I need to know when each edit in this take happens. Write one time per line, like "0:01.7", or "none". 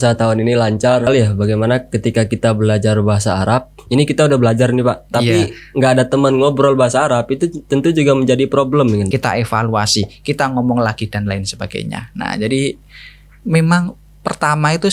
0:01.1
0:09.1